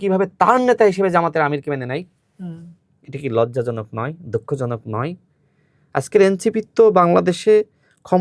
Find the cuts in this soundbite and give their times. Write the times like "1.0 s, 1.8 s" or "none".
none